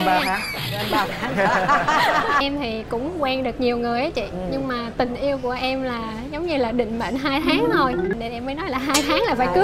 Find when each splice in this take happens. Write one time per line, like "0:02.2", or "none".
0:02.4